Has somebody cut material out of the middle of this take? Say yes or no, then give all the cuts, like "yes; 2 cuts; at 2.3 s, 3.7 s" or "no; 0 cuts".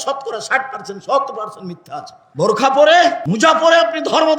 yes; 2 cuts; at 2.2 s, 3.2 s